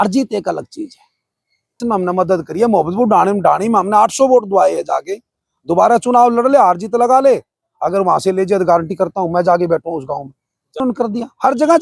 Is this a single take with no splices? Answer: no; 2 cuts; at 1.8 s, 10.8 s

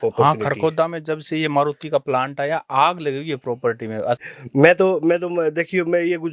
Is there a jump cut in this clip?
yes; 1 cut; at 4.2 s

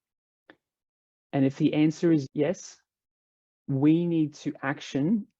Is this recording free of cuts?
no; 1 cut; at 2.2 s

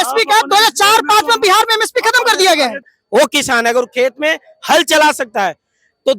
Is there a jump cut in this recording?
yes; 1 cut; at 2.9 s

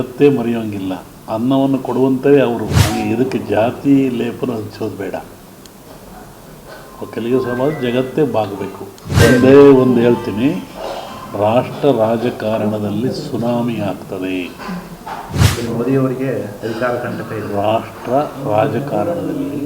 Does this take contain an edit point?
yes; 3 cuts; at 2.8 s, 9.2 s, 15.4 s

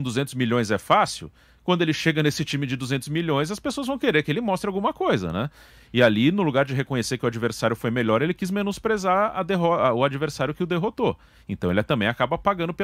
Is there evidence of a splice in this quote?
no; 0 cuts

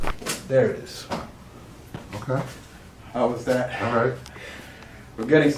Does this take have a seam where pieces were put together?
yes; 1 cut; at 1.1 s

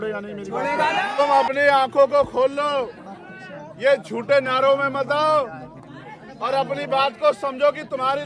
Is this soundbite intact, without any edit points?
no; 1 cut; at 1.2 s

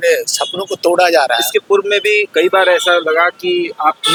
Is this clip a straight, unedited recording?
yes; 0 cuts

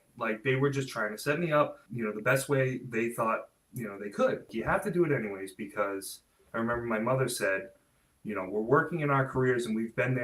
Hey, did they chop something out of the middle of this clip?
yes; 3 cuts; at 1.8 s, 3.6 s, 4.5 s

